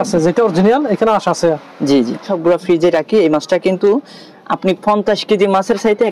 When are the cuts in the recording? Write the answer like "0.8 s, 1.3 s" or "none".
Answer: 2.3 s

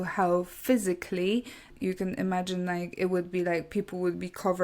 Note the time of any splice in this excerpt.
1.7 s

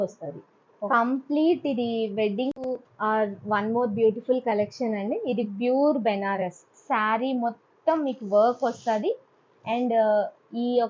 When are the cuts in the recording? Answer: 2.6 s

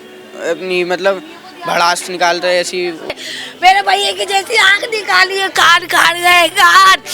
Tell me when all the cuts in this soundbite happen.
3.3 s

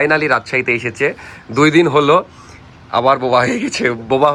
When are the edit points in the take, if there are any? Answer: none

